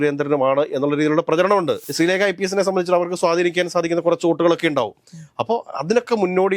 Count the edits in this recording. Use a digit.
1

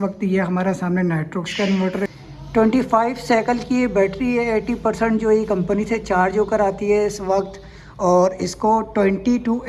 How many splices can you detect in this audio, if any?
1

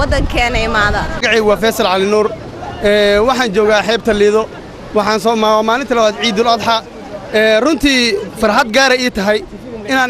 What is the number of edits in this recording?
1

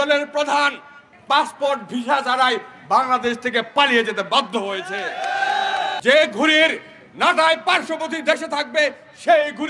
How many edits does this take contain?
2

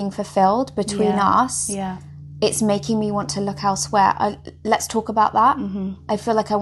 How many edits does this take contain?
0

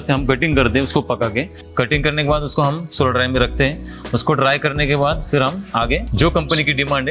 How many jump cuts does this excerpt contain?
2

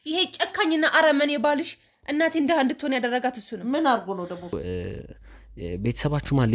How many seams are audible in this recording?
1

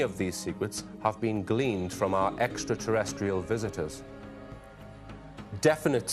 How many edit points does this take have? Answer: 0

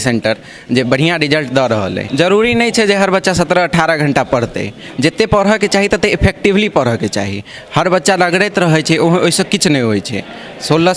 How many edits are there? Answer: 1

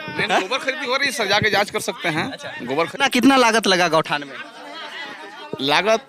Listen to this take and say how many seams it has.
1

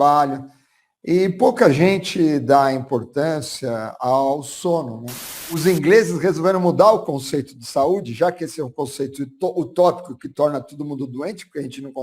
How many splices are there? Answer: 1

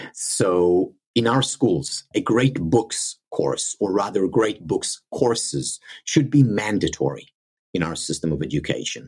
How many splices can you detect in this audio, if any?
1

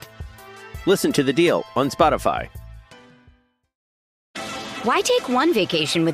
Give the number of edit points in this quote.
1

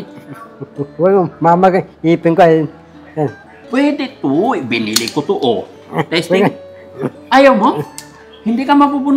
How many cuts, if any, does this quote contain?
1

